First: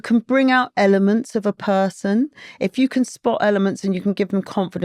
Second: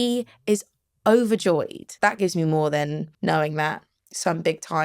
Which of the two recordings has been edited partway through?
second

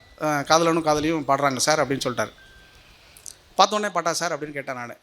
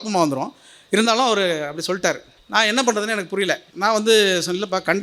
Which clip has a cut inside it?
second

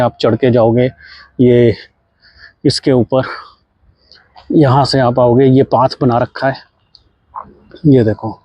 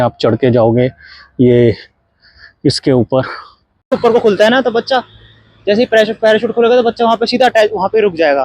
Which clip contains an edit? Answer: second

